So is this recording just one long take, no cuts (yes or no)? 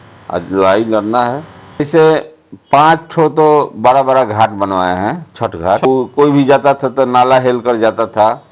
no